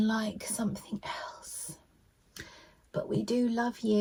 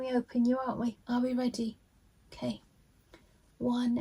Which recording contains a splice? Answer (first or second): second